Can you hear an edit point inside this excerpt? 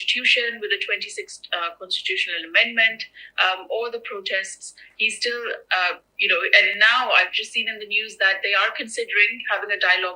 no; 0 cuts

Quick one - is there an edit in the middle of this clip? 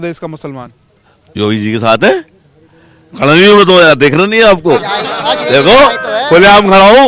no; 0 cuts

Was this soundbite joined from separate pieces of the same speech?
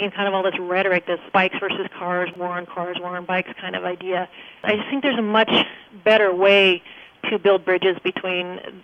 yes; 3 cuts; at 1.2 s, 2.3 s, 4.6 s

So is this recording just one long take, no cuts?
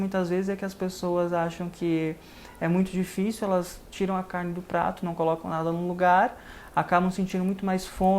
yes; 0 cuts

